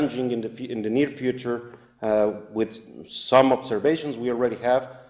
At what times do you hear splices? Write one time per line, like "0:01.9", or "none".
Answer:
0:03.7